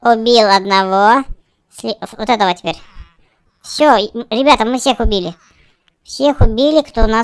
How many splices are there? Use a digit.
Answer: 0